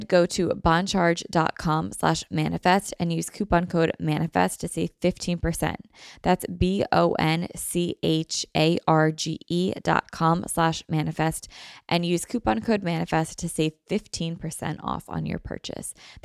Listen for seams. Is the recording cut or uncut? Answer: uncut